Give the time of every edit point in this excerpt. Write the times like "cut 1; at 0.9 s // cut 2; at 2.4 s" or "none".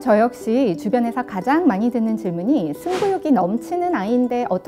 none